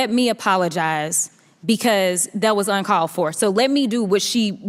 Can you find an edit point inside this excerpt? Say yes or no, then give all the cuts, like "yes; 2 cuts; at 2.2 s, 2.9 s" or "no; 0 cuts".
no; 0 cuts